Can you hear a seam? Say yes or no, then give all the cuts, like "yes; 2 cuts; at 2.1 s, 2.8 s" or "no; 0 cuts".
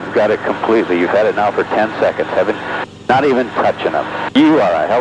no; 0 cuts